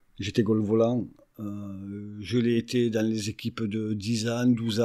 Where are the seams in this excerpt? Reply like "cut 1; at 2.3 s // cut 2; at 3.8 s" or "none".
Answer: cut 1; at 1.2 s